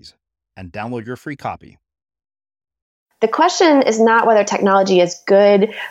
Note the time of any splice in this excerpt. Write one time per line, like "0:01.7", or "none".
0:03.0